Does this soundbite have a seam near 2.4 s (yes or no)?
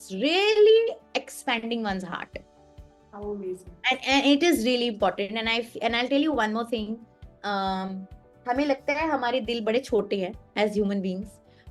no